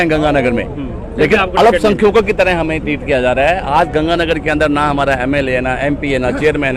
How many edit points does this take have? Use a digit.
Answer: 0